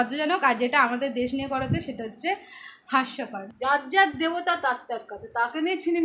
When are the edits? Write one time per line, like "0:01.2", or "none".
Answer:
0:03.4